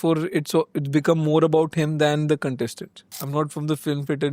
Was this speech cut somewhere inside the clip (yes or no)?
yes